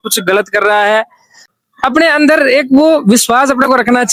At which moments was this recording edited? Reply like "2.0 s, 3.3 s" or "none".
none